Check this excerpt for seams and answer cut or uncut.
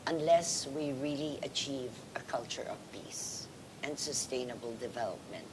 cut